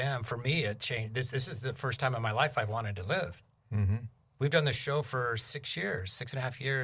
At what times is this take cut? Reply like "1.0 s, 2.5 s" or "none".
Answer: none